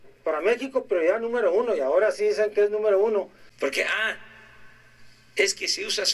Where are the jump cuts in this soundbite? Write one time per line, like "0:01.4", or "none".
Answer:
0:03.4